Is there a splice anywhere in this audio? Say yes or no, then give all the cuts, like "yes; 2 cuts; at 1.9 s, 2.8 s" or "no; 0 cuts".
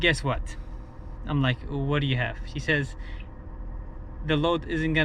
no; 0 cuts